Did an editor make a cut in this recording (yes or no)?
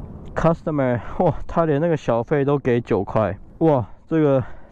no